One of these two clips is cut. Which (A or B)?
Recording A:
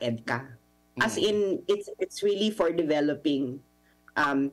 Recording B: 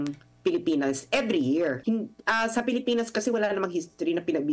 B